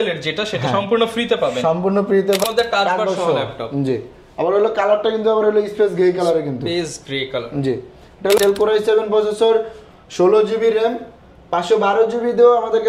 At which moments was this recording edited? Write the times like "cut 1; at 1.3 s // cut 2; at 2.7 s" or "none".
cut 1; at 2.4 s // cut 2; at 8.4 s